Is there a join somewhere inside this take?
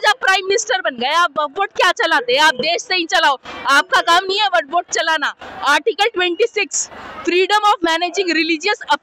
no; 0 cuts

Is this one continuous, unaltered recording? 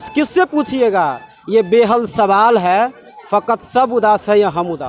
yes; 0 cuts

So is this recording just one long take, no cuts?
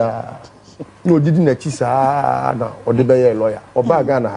yes; 0 cuts

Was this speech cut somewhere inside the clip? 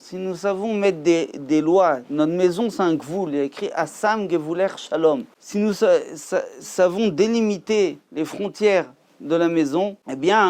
no; 0 cuts

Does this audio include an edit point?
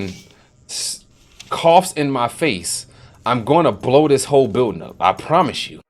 no; 0 cuts

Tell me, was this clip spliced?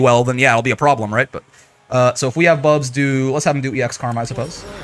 no; 0 cuts

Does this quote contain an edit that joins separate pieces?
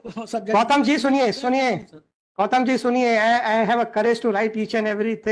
no; 0 cuts

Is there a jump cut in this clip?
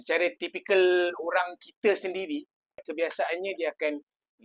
yes; 1 cut; at 2.9 s

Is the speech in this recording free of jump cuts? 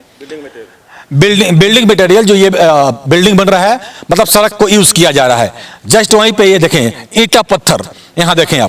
yes; 0 cuts

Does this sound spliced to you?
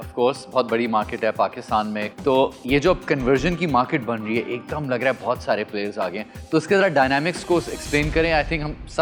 no; 0 cuts

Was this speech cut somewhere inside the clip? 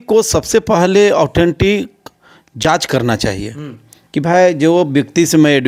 no; 0 cuts

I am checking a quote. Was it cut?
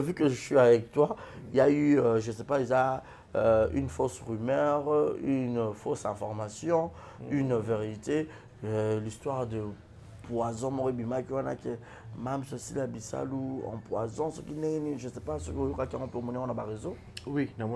no; 0 cuts

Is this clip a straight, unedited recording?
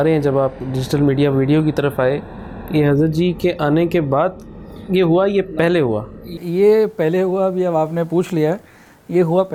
yes; 0 cuts

